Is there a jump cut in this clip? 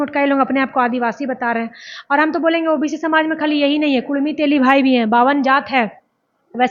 no; 0 cuts

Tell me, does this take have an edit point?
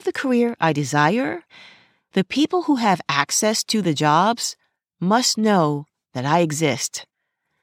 yes; 1 cut; at 1.5 s

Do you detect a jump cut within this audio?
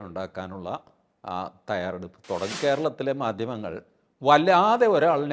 yes; 1 cut; at 2.6 s

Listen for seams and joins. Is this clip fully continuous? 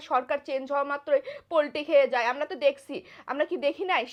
yes; 0 cuts

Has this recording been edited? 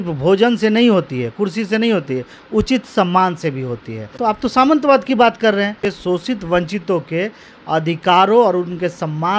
yes; 2 cuts; at 4.1 s, 5.9 s

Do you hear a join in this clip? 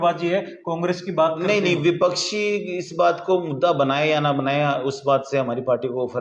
no; 0 cuts

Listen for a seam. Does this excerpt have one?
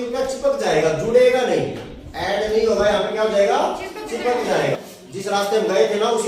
yes; 1 cut; at 4.8 s

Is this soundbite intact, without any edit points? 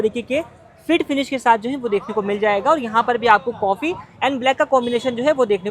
yes; 0 cuts

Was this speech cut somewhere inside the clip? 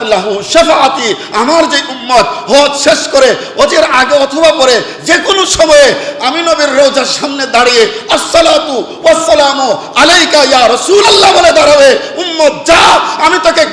no; 0 cuts

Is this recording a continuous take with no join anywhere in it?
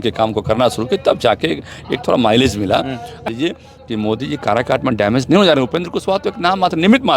no; 1 cut; at 3.3 s

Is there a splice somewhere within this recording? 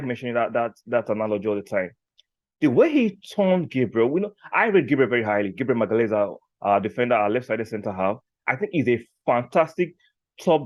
no; 0 cuts

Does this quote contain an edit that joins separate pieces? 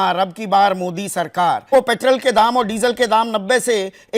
yes; 1 cut; at 1.7 s

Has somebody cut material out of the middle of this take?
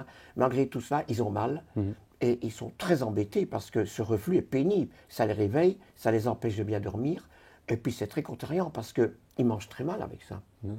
no; 0 cuts

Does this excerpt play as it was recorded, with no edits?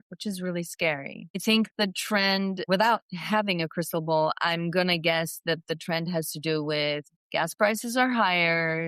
no; 3 cuts; at 1.4 s, 2.7 s, 7.1 s

